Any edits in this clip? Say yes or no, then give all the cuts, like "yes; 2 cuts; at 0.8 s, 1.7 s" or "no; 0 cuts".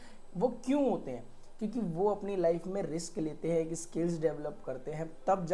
no; 0 cuts